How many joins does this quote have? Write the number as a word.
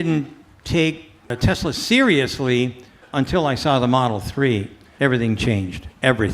three